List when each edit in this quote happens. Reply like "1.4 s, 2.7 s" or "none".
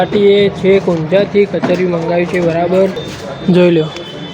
3.1 s